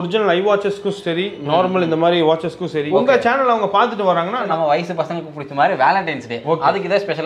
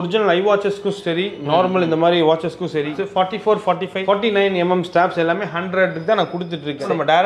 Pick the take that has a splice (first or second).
first